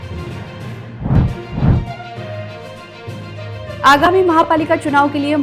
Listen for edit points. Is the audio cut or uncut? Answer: cut